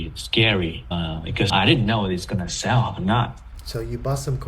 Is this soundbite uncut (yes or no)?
no